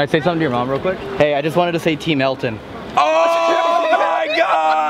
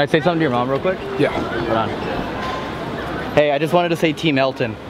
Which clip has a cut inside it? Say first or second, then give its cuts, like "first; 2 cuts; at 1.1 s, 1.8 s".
first; 1 cut; at 1.1 s